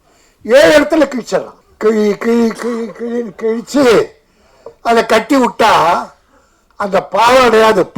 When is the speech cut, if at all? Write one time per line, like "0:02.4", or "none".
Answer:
0:01.6